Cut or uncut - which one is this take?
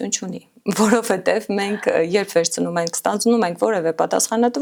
uncut